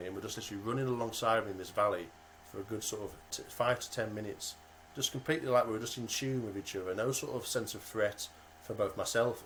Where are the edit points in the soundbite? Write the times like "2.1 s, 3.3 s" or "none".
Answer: none